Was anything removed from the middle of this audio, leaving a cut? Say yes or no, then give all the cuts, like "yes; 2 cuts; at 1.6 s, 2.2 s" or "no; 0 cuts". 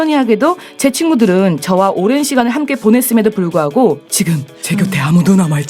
no; 0 cuts